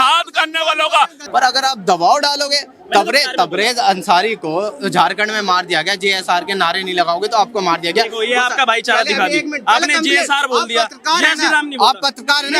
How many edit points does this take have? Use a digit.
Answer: 1